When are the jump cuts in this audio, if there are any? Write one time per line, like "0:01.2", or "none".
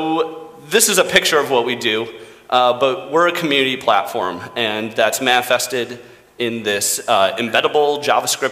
0:06.9